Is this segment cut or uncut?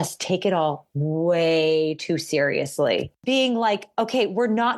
cut